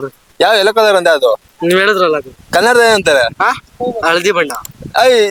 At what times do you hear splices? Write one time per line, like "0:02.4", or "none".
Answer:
none